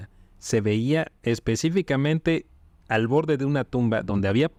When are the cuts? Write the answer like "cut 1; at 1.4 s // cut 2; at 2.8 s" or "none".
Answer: none